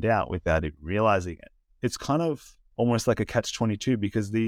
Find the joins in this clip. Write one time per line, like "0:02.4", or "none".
0:01.6
0:02.6